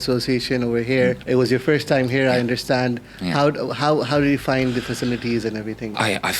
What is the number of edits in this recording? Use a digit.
1